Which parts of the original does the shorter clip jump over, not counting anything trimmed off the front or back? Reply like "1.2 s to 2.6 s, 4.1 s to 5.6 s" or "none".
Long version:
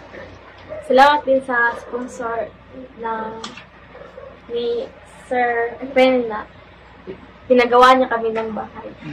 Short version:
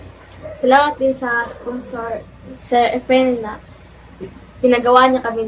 3.0 s to 5.6 s

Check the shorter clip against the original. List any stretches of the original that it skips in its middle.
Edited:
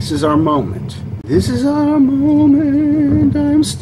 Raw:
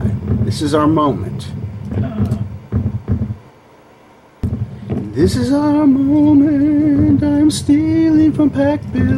1.7 s to 5.0 s

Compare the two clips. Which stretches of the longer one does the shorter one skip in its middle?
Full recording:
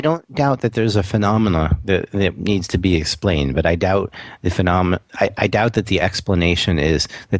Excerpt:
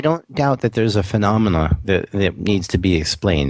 none

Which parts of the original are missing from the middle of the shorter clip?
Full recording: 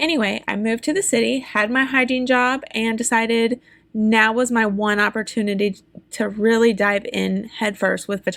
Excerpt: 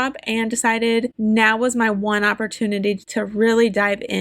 3.6 s to 3.9 s, 5.8 s to 6.1 s

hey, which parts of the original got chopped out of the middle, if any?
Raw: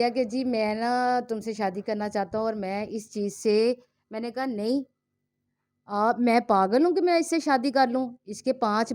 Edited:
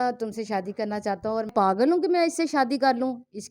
2.6 s to 6.4 s

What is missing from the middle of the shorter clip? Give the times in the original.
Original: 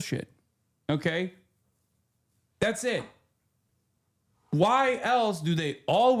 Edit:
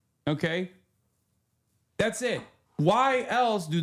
3.2 s to 4.3 s

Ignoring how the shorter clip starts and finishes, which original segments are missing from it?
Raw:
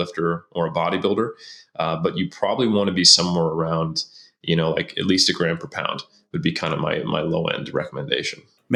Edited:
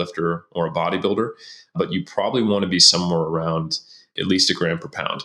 1.7 s to 2.0 s, 4.4 s to 4.9 s

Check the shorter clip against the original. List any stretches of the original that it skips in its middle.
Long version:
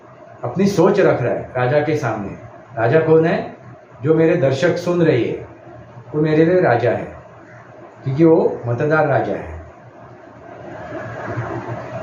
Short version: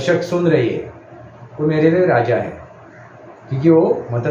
none

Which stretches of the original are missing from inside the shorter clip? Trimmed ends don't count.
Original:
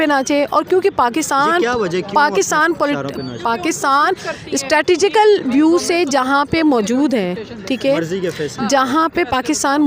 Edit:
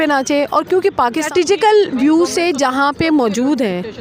1.3 s to 4.8 s

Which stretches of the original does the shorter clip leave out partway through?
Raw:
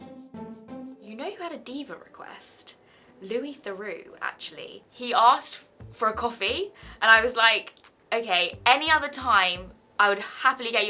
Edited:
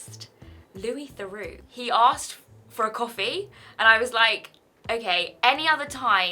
4.1 s to 4.9 s

